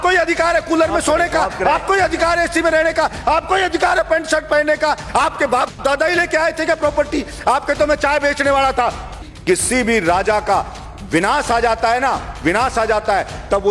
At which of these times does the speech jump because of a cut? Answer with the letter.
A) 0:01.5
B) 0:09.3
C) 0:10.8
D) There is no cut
B